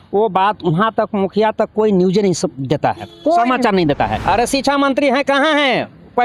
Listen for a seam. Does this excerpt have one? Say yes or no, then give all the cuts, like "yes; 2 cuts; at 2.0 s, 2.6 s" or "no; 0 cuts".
yes; 1 cut; at 4.2 s